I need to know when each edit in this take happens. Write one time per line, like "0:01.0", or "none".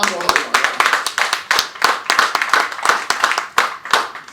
none